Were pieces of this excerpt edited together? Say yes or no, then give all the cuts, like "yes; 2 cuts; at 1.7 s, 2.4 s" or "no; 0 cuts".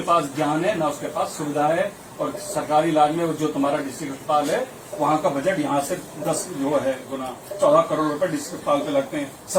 no; 0 cuts